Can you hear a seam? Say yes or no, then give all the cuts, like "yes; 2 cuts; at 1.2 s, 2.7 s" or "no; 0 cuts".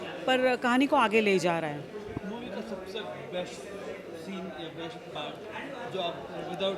no; 0 cuts